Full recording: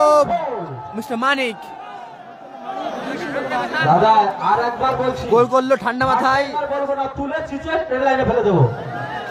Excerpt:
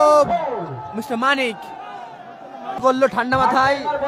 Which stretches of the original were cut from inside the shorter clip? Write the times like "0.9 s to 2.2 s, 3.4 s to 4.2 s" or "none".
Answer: 2.8 s to 5.5 s